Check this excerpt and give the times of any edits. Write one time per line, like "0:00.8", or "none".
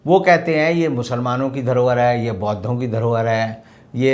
none